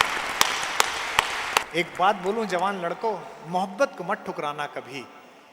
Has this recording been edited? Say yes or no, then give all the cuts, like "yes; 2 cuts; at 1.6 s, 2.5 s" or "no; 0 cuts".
yes; 1 cut; at 1.7 s